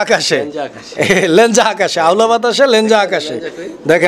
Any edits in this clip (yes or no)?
no